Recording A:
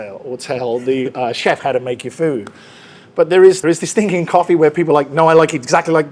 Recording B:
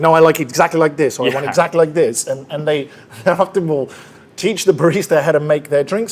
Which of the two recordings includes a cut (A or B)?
A